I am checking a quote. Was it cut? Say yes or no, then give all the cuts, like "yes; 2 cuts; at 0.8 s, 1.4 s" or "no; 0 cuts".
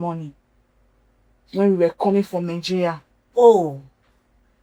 no; 0 cuts